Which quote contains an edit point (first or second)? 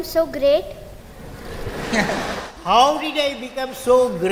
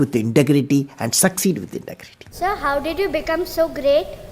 second